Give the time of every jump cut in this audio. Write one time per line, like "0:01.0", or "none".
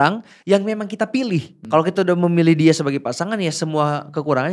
0:01.5